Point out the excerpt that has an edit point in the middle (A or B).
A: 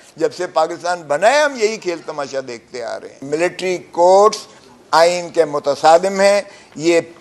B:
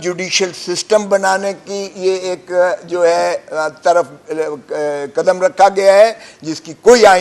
A